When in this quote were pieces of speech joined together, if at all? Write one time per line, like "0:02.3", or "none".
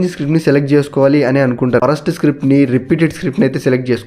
0:01.8